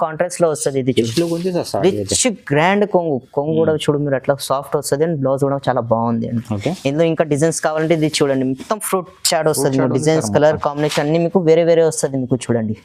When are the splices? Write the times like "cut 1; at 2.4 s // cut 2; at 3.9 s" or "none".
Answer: none